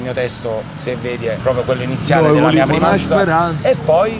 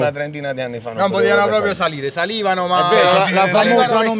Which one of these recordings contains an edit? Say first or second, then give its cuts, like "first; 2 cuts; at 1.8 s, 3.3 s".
first; 1 cut; at 1.4 s